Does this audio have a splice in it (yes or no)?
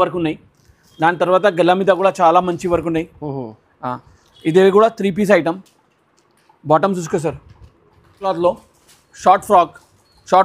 yes